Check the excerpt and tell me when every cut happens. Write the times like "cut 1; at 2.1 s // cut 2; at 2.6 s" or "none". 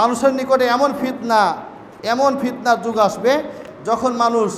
cut 1; at 3.6 s